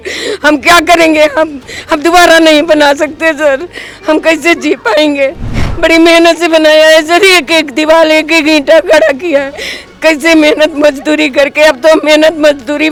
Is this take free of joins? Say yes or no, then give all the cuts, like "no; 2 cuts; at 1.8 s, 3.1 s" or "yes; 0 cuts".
yes; 0 cuts